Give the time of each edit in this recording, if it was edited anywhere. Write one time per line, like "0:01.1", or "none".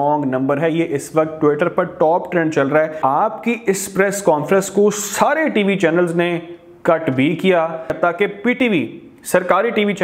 0:03.0
0:07.9